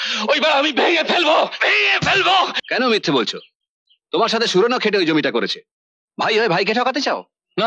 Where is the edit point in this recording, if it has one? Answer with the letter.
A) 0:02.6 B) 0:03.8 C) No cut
A